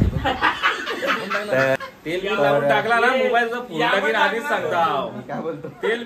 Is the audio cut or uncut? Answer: cut